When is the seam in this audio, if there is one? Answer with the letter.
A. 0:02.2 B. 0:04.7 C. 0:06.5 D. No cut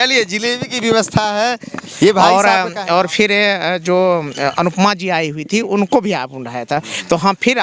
A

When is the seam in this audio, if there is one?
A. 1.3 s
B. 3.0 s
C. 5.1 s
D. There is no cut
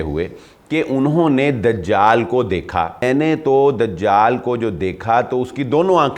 B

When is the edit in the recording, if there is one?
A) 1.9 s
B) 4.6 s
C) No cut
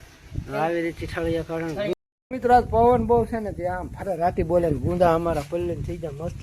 A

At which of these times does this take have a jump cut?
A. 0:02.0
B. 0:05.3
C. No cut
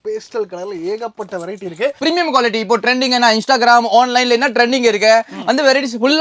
A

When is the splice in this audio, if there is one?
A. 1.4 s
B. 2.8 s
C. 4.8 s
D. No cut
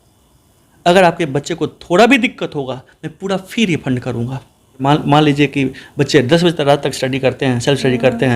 C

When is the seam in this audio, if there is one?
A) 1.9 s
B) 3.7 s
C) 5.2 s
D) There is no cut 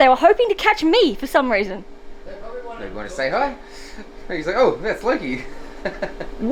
D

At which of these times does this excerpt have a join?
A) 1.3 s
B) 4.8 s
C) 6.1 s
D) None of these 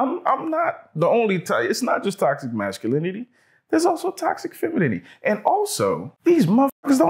C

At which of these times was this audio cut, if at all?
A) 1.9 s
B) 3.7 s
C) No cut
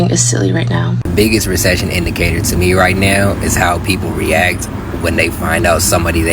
C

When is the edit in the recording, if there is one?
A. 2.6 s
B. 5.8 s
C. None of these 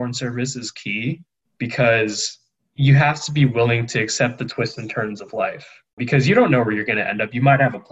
B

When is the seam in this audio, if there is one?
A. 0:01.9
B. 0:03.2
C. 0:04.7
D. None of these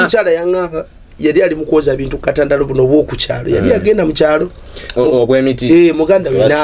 D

